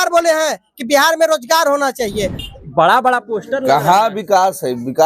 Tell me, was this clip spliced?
yes; 1 cut; at 2.4 s

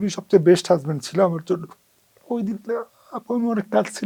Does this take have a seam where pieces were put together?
no; 0 cuts

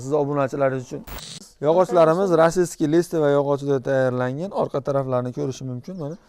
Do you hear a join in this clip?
yes; 1 cut; at 1.1 s

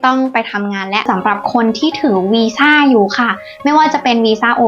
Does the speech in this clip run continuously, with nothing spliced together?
no; 1 cut; at 1.1 s

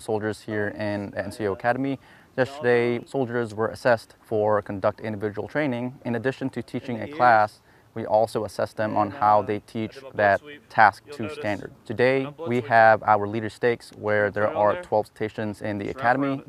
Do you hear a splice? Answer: yes; 5 cuts; at 3.0 s, 4.2 s, 6.0 s, 11.8 s, 12.4 s

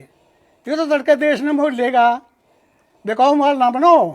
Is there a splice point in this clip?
no; 0 cuts

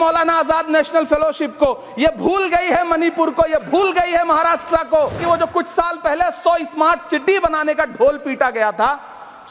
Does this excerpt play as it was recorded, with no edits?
no; 1 cut; at 5.2 s

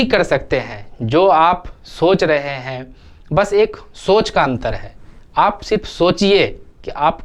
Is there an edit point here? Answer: no; 0 cuts

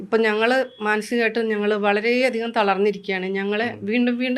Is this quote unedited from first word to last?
yes; 0 cuts

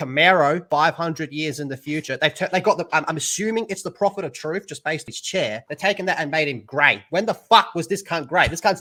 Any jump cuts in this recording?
no; 0 cuts

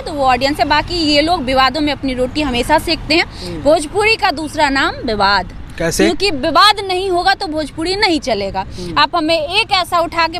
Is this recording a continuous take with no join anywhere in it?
yes; 0 cuts

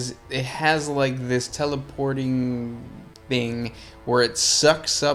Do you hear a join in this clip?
no; 0 cuts

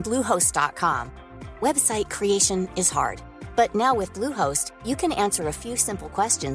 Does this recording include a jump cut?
no; 0 cuts

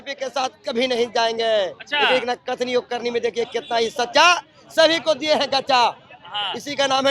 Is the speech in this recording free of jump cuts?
yes; 0 cuts

